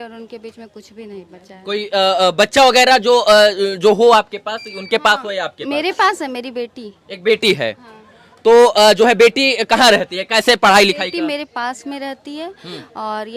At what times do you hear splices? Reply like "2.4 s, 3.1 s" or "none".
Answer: none